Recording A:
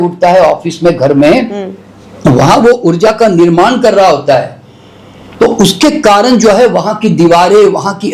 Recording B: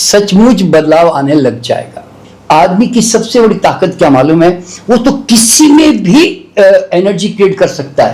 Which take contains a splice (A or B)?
B